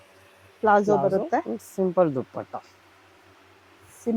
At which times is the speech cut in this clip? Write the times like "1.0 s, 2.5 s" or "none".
none